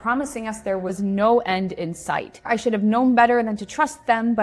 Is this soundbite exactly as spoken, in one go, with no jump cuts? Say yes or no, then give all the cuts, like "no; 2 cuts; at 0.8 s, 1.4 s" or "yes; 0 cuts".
no; 1 cut; at 2.5 s